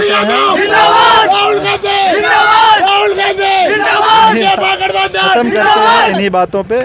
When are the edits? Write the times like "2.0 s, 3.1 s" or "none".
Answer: none